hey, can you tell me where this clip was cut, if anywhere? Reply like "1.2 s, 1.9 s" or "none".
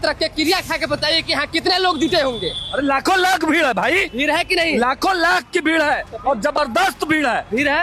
none